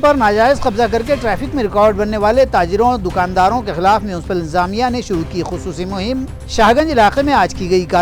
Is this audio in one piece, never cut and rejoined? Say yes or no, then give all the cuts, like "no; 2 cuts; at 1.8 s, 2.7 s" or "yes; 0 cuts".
yes; 0 cuts